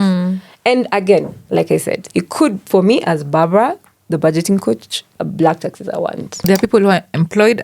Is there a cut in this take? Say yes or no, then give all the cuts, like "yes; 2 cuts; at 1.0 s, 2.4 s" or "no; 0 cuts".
yes; 2 cuts; at 5.2 s, 6.5 s